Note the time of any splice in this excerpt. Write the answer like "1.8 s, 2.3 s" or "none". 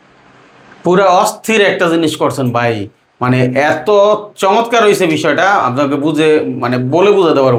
none